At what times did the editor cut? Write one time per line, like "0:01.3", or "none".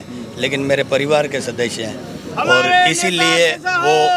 none